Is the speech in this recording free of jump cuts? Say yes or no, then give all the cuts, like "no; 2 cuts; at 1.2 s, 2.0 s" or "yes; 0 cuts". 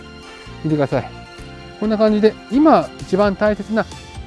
no; 1 cut; at 1.6 s